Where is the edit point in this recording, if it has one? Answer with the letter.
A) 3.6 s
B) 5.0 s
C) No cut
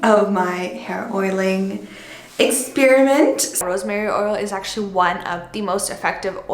A